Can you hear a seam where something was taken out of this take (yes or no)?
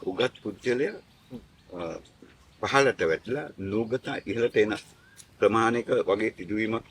no